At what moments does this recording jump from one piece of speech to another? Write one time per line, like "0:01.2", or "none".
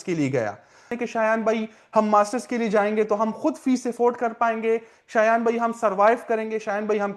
0:00.9